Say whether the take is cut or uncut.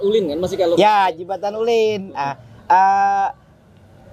uncut